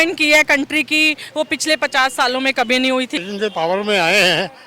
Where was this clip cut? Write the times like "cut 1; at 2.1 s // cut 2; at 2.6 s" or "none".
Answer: cut 1; at 3.2 s